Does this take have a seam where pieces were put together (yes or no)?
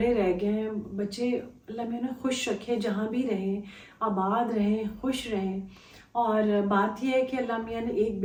no